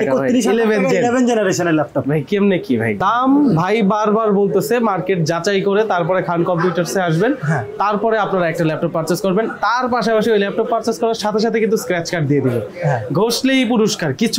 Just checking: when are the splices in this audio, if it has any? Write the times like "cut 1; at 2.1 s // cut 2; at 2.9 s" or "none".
cut 1; at 3.0 s